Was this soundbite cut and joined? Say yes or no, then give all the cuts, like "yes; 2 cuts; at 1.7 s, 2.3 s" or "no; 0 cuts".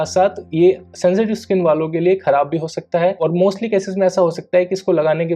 no; 0 cuts